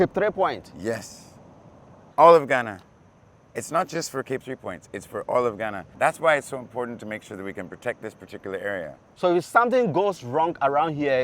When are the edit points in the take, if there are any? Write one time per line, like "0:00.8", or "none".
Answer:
0:02.0
0:05.8
0:09.0